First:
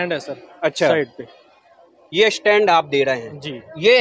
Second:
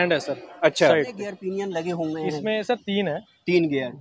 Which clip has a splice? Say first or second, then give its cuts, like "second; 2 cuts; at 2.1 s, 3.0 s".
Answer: second; 1 cut; at 1.3 s